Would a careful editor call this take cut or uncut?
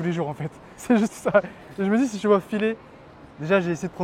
uncut